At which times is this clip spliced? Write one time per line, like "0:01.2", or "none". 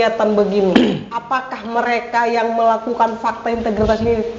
none

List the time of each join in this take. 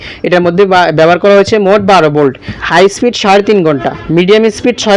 0:02.6
0:03.9

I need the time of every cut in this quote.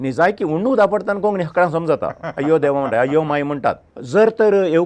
0:03.9

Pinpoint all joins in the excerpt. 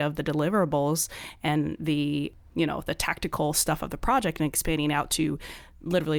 none

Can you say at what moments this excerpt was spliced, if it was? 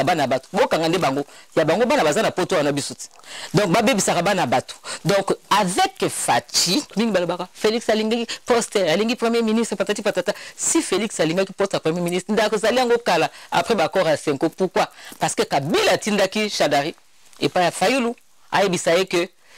0:06.9

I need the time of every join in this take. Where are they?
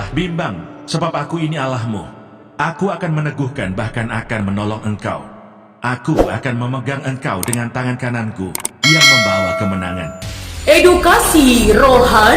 none

